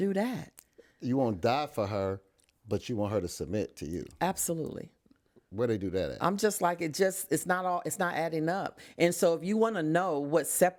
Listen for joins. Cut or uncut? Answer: uncut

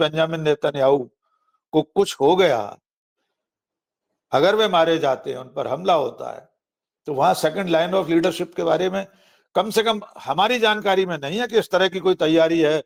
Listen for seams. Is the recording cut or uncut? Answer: uncut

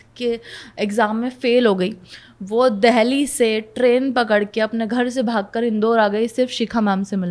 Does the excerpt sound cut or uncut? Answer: uncut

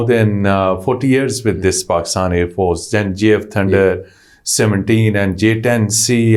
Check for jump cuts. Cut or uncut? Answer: uncut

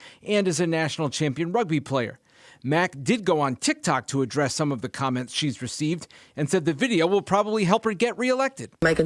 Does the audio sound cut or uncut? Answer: cut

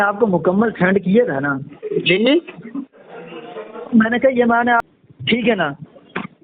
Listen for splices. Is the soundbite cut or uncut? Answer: cut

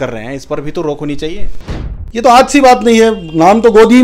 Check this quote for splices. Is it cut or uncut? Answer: cut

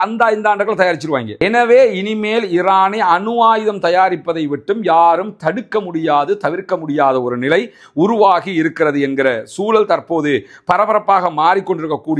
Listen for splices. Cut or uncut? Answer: uncut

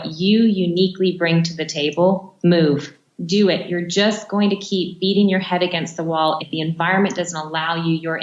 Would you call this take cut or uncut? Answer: cut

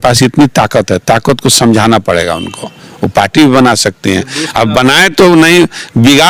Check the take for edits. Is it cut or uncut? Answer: uncut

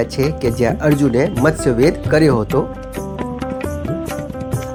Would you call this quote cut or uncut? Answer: uncut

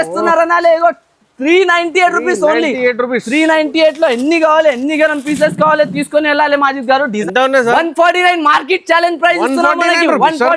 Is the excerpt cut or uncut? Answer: cut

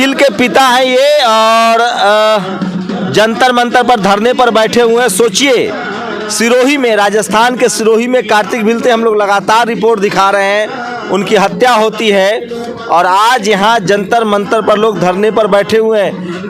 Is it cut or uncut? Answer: uncut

